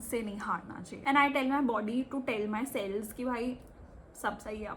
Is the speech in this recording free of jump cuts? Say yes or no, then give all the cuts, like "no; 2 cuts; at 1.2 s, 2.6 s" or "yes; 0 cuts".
no; 1 cut; at 0.9 s